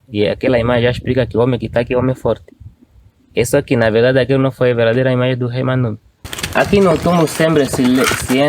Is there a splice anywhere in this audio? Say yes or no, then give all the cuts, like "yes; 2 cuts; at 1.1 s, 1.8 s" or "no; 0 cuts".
yes; 1 cut; at 6.4 s